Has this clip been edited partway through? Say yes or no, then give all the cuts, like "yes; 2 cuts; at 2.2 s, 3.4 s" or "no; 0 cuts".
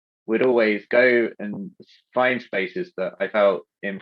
no; 0 cuts